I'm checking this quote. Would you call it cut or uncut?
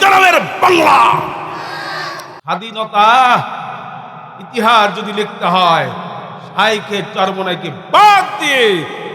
cut